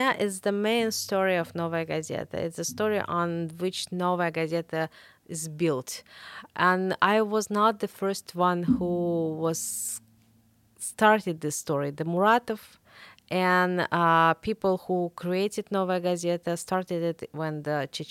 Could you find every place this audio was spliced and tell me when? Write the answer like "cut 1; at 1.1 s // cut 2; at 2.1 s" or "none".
none

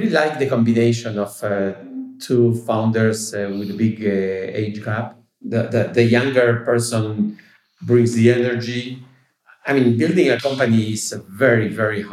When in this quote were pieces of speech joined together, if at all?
cut 1; at 5.5 s

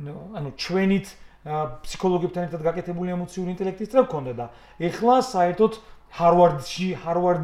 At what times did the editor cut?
none

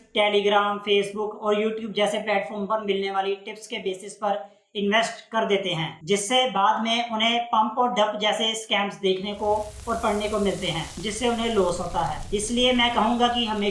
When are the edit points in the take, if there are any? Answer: none

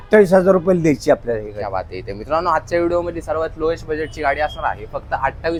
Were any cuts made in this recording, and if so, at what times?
none

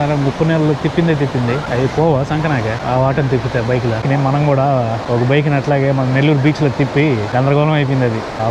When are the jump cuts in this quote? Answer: none

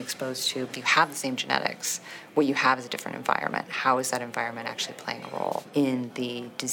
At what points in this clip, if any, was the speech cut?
cut 1; at 5.7 s

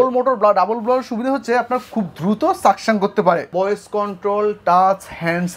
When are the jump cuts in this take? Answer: cut 1; at 3.5 s

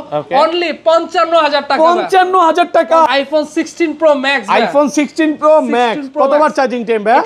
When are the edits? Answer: cut 1; at 3.1 s

